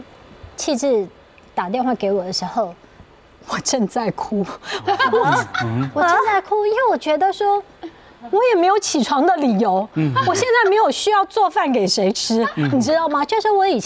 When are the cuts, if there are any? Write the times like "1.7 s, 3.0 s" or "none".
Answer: none